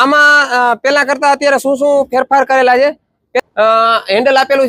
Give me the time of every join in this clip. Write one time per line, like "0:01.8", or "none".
0:03.2